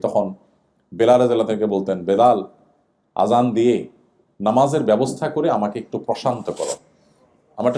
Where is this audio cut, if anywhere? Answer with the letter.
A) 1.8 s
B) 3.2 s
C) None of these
C